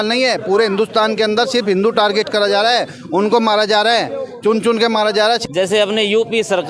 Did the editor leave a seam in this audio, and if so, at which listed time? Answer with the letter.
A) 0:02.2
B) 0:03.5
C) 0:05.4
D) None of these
C